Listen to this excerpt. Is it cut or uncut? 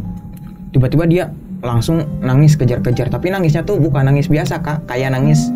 uncut